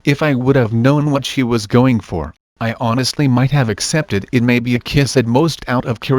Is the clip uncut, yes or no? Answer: yes